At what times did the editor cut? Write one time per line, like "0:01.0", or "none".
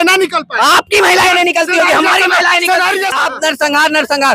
0:03.2

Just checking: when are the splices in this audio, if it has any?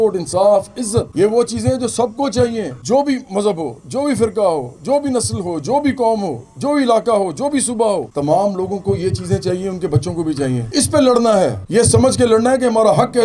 0:10.7

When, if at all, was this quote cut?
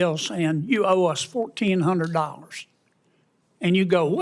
none

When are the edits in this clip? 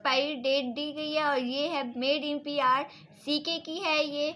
none

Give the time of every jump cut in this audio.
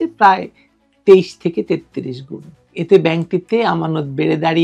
none

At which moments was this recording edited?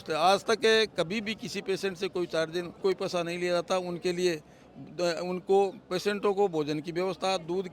0:02.7

